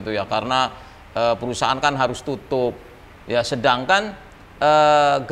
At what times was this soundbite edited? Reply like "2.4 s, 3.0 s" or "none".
none